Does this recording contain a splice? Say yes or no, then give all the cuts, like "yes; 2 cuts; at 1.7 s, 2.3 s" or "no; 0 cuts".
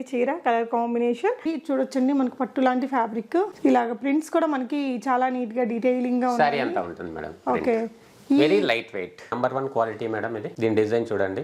yes; 2 cuts; at 1.4 s, 9.3 s